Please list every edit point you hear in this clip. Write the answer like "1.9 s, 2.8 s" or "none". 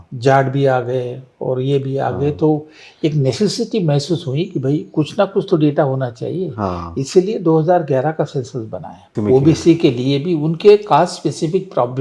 9.1 s